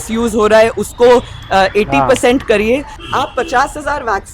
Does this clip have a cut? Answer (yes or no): yes